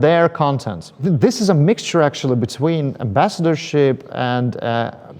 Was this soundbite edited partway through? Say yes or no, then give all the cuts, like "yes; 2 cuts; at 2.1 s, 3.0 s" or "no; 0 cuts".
yes; 1 cut; at 1.0 s